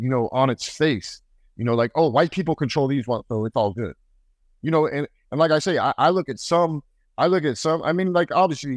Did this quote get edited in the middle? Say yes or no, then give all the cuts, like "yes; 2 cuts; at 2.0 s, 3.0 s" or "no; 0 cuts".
no; 0 cuts